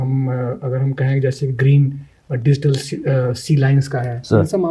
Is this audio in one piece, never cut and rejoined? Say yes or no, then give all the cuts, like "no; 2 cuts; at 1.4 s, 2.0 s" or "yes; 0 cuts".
yes; 0 cuts